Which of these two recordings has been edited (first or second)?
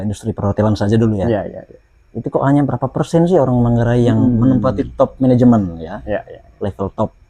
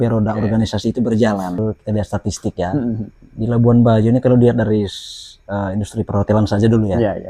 second